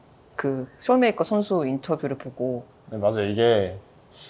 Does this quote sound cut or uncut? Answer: cut